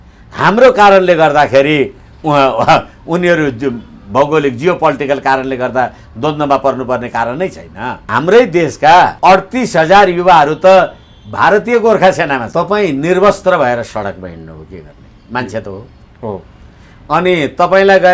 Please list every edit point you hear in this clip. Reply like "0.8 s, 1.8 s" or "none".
8.0 s, 9.1 s, 12.4 s

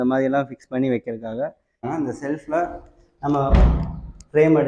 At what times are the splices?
1.9 s

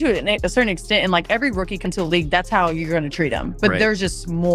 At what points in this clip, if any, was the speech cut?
1.8 s

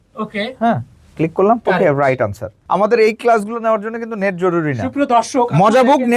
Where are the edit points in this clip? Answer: 2.5 s

